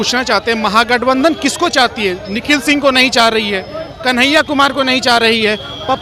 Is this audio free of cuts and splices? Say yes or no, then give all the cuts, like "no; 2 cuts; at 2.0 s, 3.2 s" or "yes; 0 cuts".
yes; 0 cuts